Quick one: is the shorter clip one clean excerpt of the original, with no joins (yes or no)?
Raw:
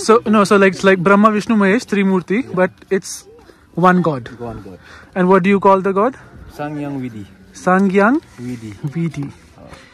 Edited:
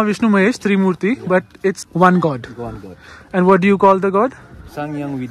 no